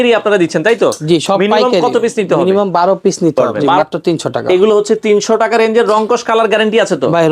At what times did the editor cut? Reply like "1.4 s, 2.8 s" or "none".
3.6 s